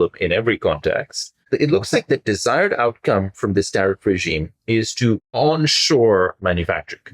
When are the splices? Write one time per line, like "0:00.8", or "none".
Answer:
0:01.4
0:05.3
0:06.4